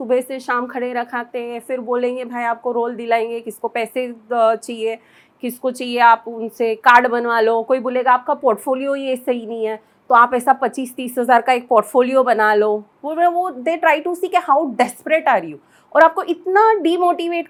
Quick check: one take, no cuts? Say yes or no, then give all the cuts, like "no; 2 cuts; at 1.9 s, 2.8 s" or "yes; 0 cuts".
yes; 0 cuts